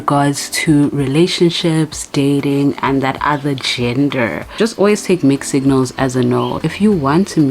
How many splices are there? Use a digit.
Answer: 2